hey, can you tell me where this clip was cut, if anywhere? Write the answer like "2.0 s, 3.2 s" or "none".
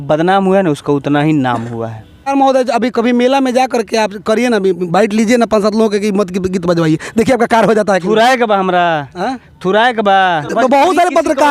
2.3 s, 10.5 s